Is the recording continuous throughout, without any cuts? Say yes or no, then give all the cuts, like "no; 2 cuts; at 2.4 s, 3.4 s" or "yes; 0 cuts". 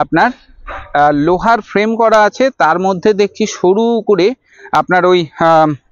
yes; 0 cuts